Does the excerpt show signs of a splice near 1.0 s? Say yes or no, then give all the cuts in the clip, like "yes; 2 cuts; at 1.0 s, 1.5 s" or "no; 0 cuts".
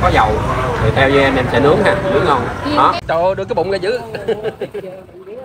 no; 1 cut; at 3.0 s